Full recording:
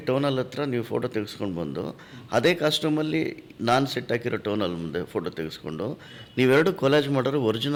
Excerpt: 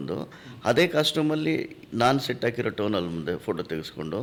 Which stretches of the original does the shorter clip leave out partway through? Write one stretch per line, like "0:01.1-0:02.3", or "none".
none